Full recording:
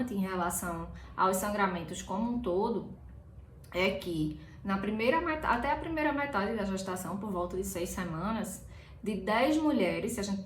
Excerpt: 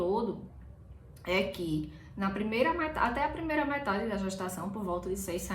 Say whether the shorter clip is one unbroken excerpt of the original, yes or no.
yes